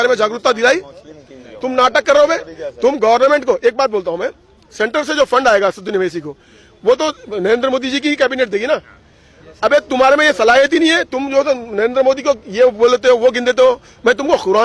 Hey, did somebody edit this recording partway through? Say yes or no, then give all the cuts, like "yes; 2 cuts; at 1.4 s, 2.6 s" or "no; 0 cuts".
no; 0 cuts